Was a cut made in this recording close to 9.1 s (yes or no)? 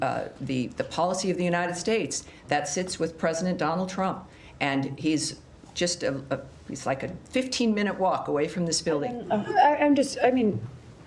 yes